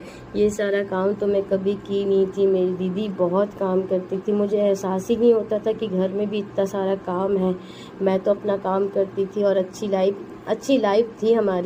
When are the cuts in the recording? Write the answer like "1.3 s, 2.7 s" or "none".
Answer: none